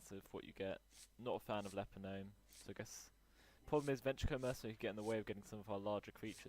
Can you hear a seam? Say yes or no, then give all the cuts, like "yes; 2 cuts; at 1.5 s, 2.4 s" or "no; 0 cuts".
yes; 1 cut; at 3.7 s